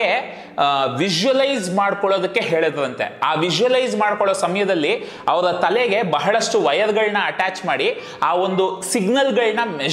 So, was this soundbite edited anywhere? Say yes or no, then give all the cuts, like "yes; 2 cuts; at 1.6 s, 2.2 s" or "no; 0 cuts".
no; 0 cuts